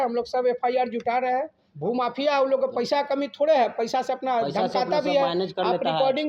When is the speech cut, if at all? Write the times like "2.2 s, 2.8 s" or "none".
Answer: 1.6 s